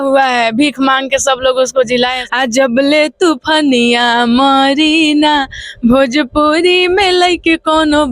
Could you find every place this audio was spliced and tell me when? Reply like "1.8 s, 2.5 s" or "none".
2.1 s